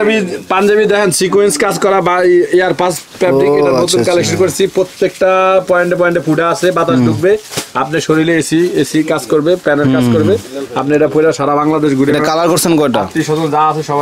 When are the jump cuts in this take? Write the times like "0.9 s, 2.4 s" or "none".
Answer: none